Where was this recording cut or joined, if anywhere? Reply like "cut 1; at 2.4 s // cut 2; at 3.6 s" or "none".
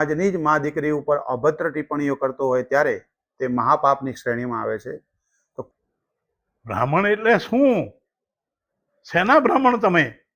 cut 1; at 5.7 s

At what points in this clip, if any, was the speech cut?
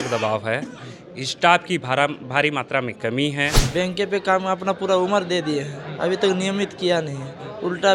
cut 1; at 3.6 s

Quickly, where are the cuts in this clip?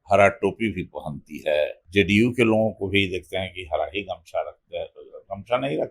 cut 1; at 1.8 s

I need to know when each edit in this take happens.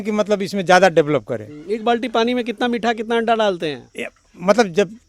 none

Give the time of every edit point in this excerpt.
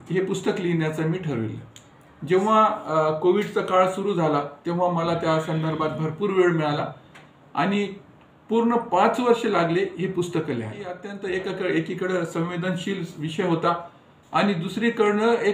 cut 1; at 11.1 s

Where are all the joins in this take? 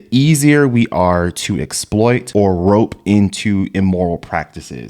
cut 1; at 2.2 s

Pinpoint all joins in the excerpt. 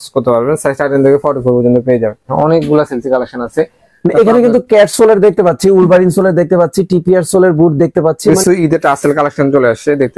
cut 1; at 2.3 s // cut 2; at 8.4 s

